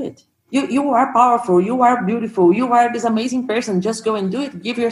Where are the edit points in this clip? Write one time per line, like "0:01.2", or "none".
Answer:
none